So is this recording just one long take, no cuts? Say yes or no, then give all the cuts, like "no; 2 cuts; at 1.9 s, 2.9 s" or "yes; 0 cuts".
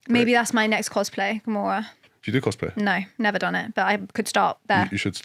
yes; 0 cuts